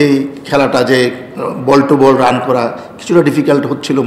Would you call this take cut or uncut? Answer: uncut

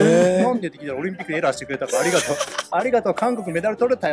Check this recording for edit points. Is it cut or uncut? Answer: uncut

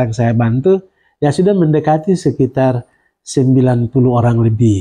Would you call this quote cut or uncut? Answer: uncut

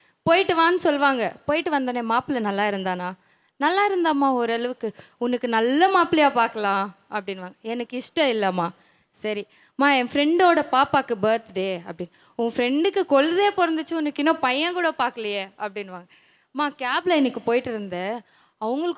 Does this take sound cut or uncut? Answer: uncut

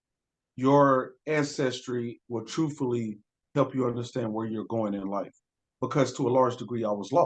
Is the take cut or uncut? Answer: cut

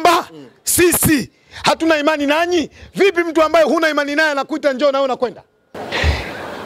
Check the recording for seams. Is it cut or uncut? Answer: cut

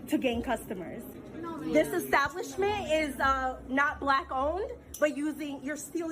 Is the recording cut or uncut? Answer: cut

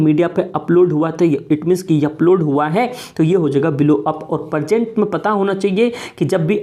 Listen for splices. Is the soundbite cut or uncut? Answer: uncut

